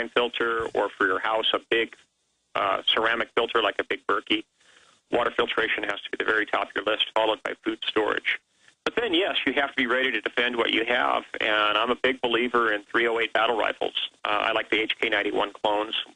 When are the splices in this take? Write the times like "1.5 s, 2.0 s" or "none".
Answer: 14.9 s